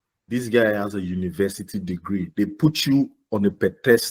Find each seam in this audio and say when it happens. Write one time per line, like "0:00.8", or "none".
none